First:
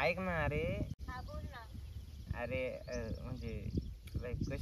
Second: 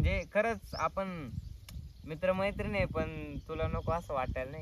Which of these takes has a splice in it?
first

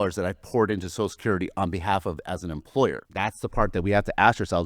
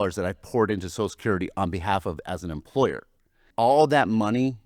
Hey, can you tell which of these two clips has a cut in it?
first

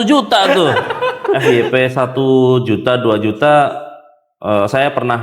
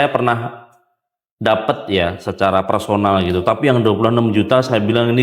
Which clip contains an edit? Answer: first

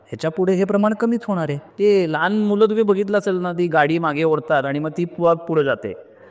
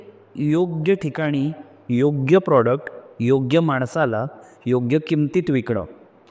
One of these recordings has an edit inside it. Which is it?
first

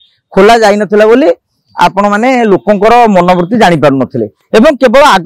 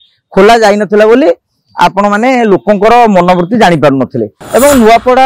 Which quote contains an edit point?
second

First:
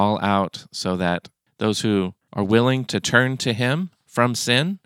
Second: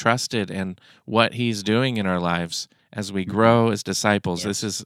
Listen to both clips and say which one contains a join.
first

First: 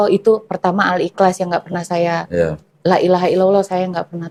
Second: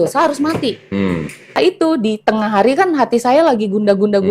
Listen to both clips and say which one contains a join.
second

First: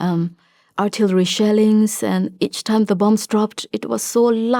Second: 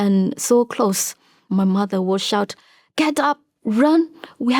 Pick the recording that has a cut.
second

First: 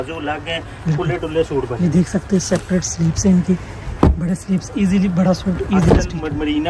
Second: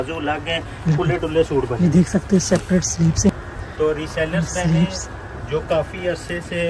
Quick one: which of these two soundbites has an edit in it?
second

